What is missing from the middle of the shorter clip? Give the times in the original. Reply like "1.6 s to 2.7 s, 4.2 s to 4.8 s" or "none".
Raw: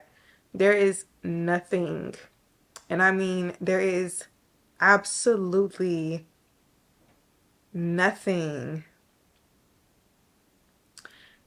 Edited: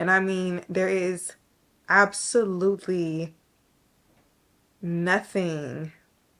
none